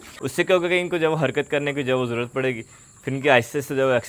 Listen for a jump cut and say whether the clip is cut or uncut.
uncut